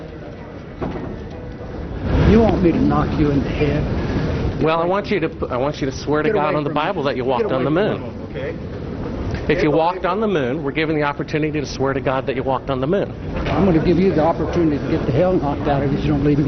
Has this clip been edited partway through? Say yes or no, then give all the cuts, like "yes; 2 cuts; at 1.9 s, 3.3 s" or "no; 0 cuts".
no; 0 cuts